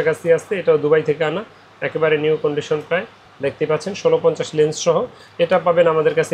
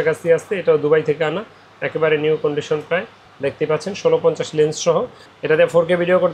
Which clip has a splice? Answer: second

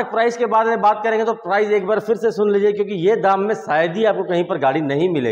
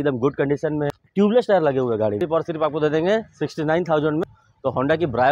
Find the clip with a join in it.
second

